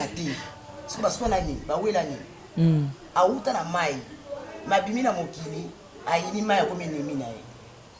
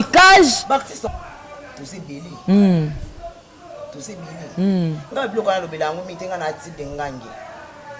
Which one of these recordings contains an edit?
second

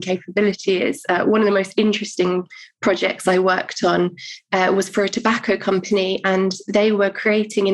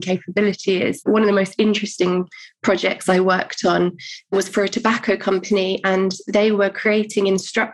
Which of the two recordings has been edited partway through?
second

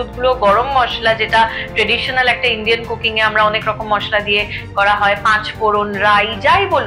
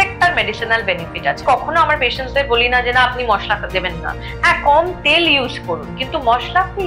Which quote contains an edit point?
second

